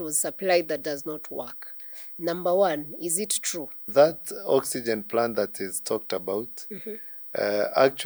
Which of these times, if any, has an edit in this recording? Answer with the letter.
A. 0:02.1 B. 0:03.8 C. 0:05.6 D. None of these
B